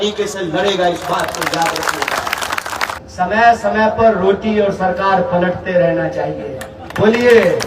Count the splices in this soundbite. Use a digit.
1